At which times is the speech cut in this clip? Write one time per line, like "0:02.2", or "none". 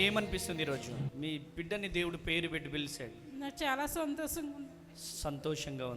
0:01.1